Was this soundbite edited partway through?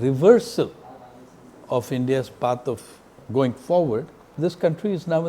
yes; 2 cuts; at 3.2 s, 4.3 s

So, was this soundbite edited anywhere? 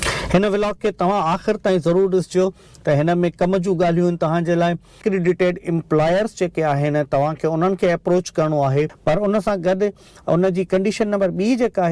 yes; 2 cuts; at 5.0 s, 8.9 s

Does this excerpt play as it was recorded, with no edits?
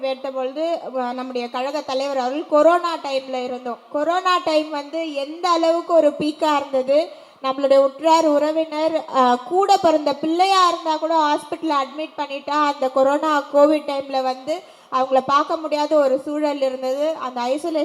yes; 0 cuts

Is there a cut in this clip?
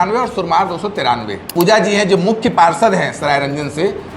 yes; 1 cut; at 1.5 s

